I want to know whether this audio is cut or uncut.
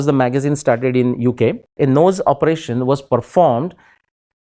cut